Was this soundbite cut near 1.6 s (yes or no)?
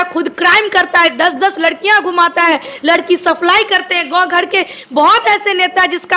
no